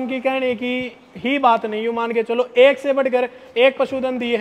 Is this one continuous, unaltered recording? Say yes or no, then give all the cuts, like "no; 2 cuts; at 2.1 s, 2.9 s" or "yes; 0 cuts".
yes; 0 cuts